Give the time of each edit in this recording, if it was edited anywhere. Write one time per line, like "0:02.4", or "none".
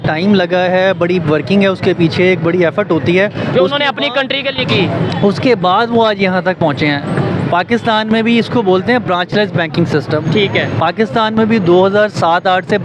none